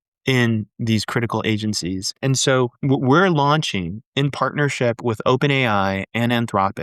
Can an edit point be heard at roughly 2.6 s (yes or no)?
yes